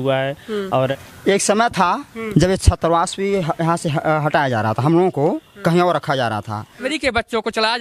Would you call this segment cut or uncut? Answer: cut